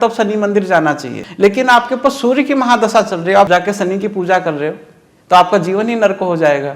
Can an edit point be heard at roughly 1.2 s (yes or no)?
yes